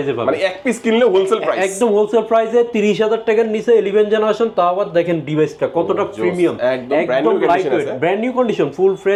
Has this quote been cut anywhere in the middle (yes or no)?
no